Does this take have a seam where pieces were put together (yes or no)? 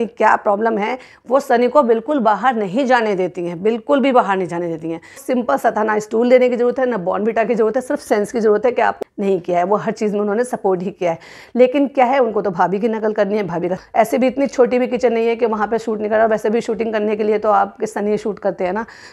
yes